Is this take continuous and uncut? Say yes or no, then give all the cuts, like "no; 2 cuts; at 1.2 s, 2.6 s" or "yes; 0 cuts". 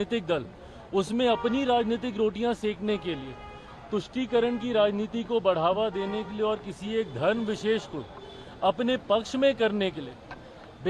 yes; 0 cuts